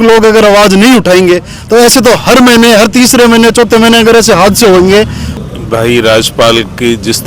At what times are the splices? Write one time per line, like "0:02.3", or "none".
0:05.2